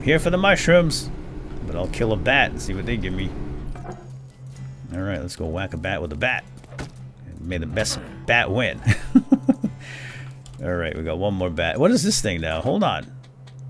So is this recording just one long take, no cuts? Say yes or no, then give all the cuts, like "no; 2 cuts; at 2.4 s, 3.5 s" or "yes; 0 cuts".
yes; 0 cuts